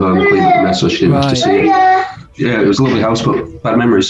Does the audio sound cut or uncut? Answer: cut